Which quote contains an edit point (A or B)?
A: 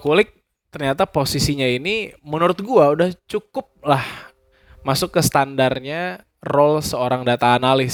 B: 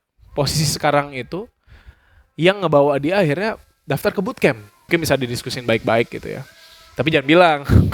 B